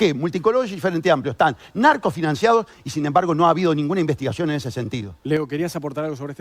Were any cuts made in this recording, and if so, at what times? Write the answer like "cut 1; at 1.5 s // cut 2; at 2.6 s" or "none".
none